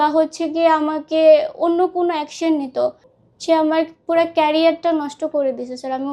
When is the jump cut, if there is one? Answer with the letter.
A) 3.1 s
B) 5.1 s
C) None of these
A